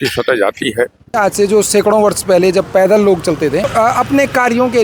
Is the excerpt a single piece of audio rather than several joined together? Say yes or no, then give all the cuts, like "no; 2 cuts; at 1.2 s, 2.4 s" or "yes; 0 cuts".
no; 2 cuts; at 1.2 s, 3.7 s